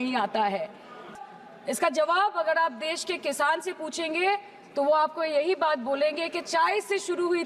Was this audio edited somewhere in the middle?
yes; 1 cut; at 1.1 s

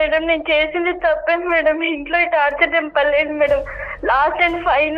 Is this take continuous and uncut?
yes; 0 cuts

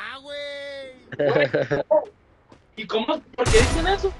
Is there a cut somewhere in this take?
no; 0 cuts

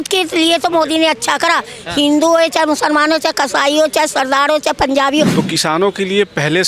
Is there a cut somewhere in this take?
yes; 1 cut; at 5.4 s

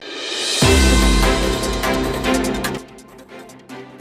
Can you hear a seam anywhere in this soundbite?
no; 0 cuts

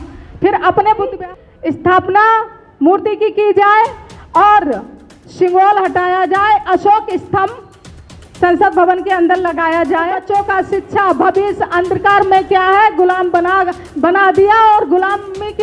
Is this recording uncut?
no; 2 cuts; at 1.1 s, 10.2 s

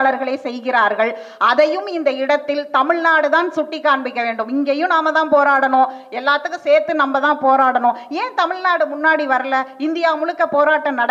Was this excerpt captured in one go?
yes; 0 cuts

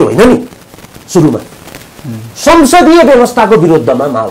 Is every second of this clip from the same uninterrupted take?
yes; 0 cuts

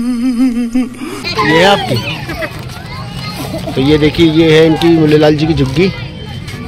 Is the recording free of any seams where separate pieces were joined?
no; 1 cut; at 1.2 s

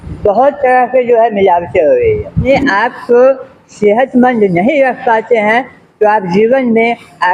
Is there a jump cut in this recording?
yes; 1 cut; at 2.5 s

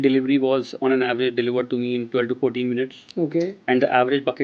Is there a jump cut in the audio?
no; 0 cuts

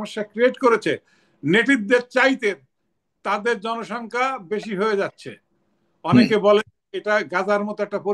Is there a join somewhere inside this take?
no; 0 cuts

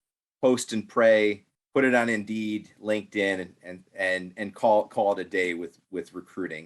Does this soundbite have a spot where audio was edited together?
yes; 2 cuts; at 1.5 s, 5.8 s

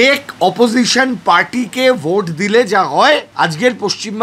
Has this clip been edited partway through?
yes; 1 cut; at 3.3 s

